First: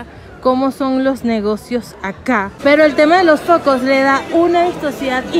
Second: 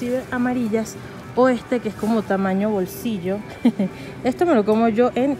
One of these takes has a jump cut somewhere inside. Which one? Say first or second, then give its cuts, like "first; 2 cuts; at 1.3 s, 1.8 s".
first; 1 cut; at 2.6 s